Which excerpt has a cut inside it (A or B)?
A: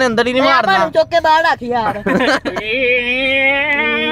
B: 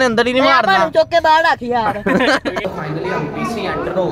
B